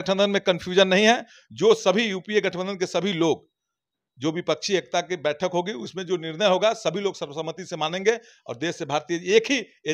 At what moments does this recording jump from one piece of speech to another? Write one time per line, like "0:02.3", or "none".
none